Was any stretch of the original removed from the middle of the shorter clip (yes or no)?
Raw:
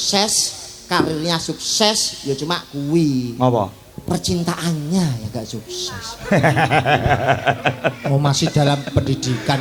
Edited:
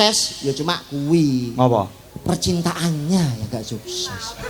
no